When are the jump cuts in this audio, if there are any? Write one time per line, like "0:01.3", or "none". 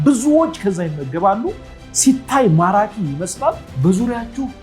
0:03.7